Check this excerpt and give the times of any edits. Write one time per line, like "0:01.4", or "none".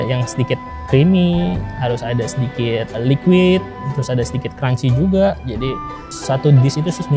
0:06.1